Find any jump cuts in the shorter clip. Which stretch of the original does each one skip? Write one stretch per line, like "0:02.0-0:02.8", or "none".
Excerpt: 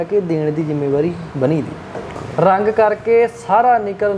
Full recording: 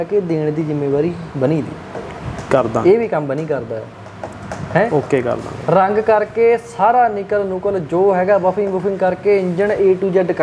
0:02.2-0:05.5